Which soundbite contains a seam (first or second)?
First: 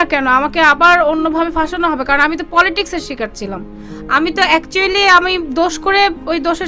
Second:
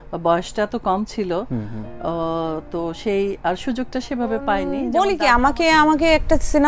second